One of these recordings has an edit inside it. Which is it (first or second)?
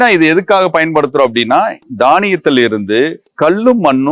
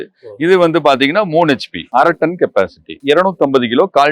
second